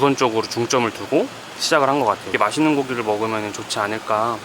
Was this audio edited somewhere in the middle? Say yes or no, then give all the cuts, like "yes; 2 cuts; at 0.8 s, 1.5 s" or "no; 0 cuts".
yes; 1 cut; at 2.3 s